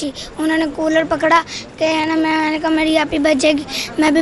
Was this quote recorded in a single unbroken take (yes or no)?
yes